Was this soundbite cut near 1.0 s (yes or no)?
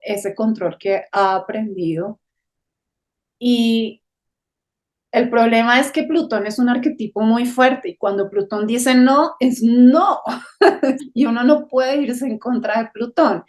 no